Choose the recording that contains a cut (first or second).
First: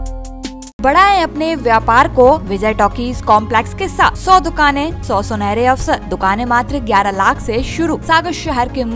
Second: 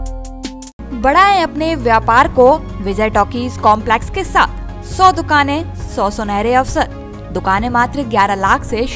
first